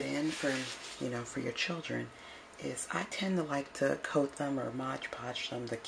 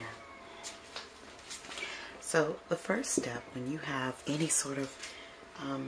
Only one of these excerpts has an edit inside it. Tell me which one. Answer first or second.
first